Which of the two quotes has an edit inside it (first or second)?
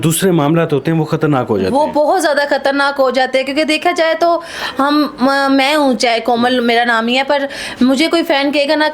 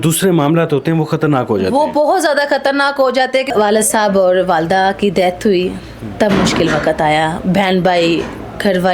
second